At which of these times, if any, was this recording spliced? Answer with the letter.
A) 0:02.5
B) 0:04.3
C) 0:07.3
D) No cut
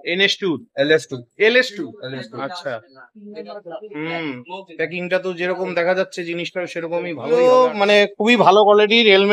C